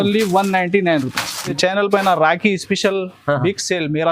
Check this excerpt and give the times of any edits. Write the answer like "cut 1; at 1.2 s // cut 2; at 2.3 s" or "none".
cut 1; at 1.5 s